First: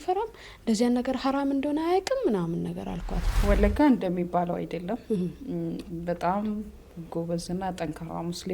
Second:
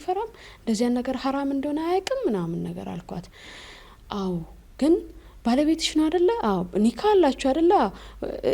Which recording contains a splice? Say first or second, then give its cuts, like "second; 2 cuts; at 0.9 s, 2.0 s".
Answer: first; 1 cut; at 3.4 s